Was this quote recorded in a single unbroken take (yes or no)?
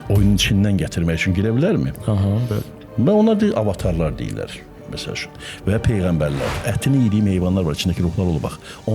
no